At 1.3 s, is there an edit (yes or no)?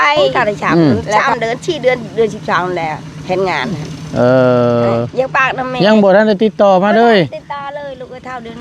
yes